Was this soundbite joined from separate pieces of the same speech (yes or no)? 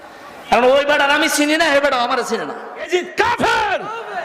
yes